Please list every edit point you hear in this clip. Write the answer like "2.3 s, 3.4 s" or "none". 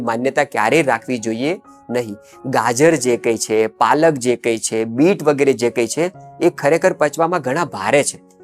none

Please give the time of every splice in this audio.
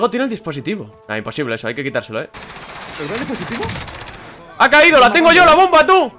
0.9 s, 2.3 s

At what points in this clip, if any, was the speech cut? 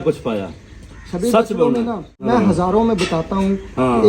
2.1 s

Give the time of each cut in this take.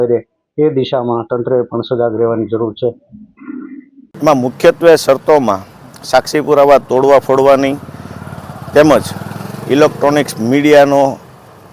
4.0 s

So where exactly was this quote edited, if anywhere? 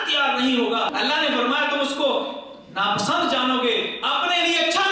0.9 s

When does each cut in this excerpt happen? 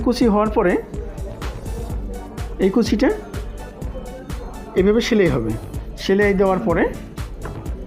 none

